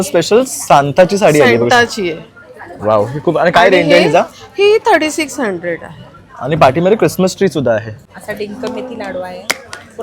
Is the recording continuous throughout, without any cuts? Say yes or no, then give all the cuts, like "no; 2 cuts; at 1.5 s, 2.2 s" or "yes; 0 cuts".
no; 1 cut; at 8.0 s